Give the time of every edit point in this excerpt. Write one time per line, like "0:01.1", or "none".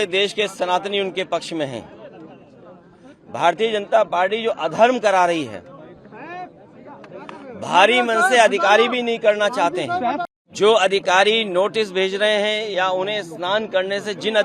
0:10.2